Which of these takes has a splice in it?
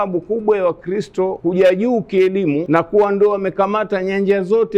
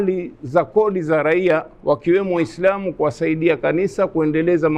first; 2 cuts; at 1.4 s, 2.6 s

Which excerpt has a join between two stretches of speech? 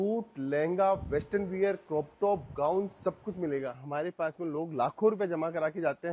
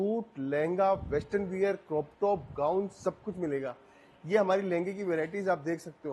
first; 1 cut; at 3.8 s

